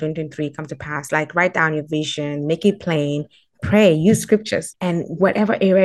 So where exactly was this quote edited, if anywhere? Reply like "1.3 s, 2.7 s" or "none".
4.7 s

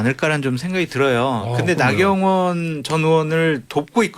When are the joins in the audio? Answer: none

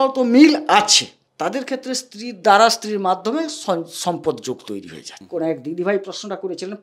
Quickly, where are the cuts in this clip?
5.2 s

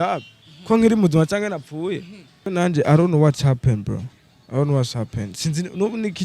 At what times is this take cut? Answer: 2.5 s

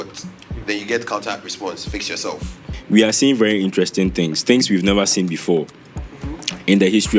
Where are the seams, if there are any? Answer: 2.7 s

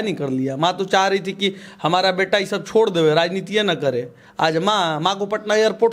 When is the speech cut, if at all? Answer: none

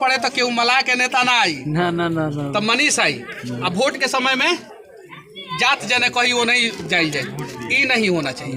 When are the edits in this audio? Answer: none

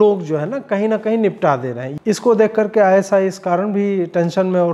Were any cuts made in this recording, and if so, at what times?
1.9 s

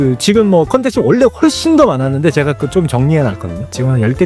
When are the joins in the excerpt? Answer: none

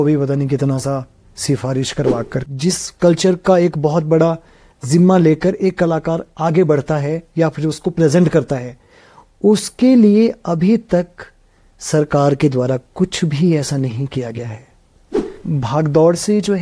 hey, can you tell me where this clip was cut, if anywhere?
2.5 s, 15.3 s

